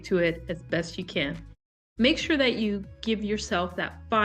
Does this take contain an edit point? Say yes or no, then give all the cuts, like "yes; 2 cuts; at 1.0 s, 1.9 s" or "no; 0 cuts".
no; 0 cuts